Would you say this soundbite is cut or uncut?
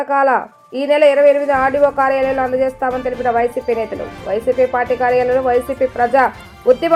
uncut